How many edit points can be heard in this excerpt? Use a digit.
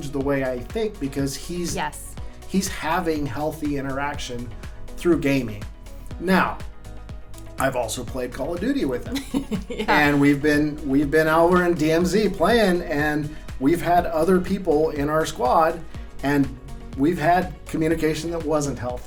0